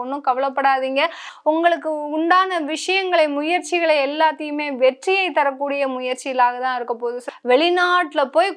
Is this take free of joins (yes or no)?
no